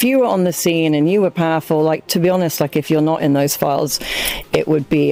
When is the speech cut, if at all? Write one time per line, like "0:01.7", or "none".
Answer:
none

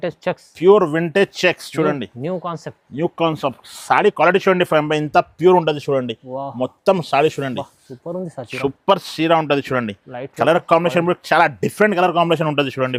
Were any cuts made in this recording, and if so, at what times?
none

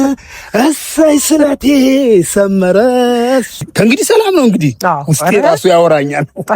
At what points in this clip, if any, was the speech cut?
0:03.6

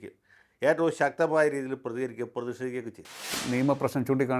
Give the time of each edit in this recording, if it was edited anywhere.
0:03.3

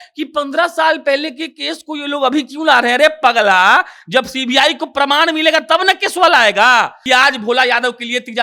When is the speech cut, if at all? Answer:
0:07.0

